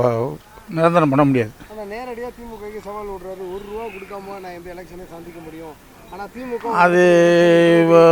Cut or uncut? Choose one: uncut